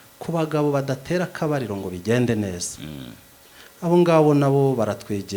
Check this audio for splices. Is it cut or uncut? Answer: uncut